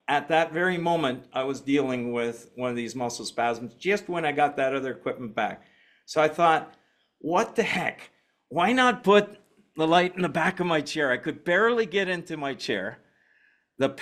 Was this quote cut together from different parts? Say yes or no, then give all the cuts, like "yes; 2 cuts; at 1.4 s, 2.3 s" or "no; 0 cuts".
no; 0 cuts